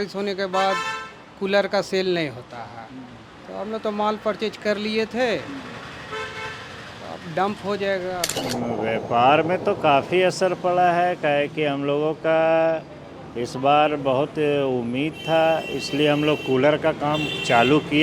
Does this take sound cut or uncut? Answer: cut